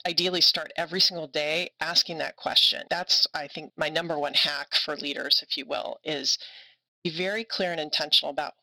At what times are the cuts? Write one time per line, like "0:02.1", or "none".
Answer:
0:03.6